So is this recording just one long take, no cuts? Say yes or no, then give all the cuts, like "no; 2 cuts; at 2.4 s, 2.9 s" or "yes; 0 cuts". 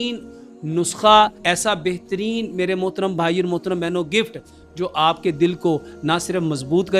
yes; 0 cuts